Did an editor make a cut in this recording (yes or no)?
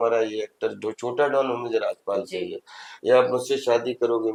no